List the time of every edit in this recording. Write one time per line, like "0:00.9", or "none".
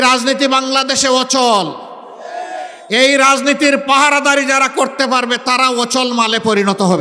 none

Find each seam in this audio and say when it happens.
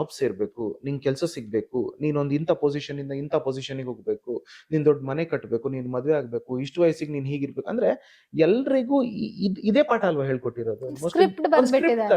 none

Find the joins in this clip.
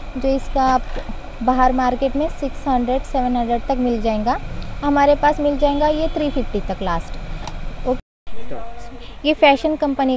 0:08.0

